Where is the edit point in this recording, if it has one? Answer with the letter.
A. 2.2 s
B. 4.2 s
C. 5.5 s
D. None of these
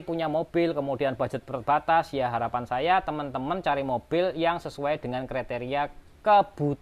D